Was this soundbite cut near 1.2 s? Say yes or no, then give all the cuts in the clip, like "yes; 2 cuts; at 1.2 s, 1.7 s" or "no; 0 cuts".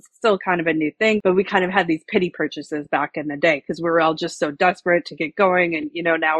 yes; 1 cut; at 1.2 s